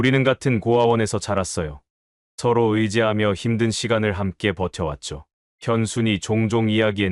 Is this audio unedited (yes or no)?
yes